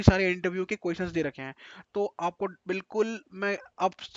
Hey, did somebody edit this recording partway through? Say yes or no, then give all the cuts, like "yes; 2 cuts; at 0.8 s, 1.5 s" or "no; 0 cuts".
no; 0 cuts